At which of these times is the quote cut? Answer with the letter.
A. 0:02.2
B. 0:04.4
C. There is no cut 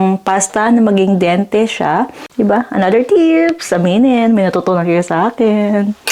A